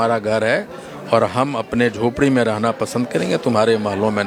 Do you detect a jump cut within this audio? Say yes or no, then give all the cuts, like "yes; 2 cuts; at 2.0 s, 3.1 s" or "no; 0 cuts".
no; 0 cuts